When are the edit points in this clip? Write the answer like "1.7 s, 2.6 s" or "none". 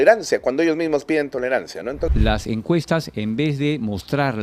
2.1 s